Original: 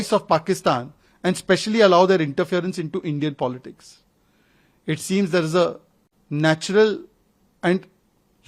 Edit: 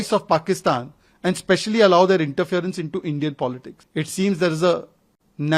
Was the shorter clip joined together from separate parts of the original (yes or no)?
yes